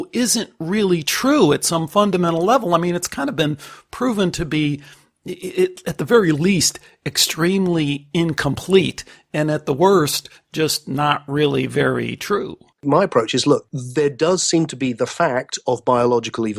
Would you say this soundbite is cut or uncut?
cut